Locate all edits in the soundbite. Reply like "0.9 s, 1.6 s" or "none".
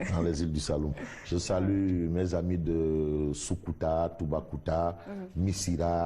1.1 s